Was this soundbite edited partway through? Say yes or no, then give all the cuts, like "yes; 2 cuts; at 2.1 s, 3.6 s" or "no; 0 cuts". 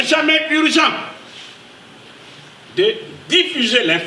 no; 0 cuts